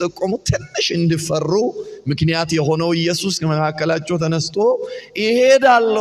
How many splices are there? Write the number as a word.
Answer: zero